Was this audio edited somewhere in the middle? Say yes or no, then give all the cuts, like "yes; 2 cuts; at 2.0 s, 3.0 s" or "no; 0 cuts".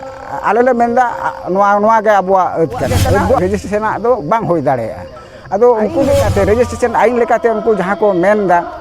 yes; 2 cuts; at 3.4 s, 6.3 s